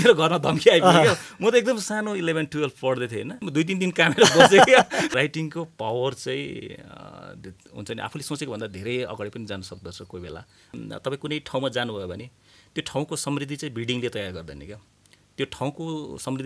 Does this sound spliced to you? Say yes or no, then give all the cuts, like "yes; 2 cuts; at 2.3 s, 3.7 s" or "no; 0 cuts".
yes; 3 cuts; at 3.4 s, 5.1 s, 10.8 s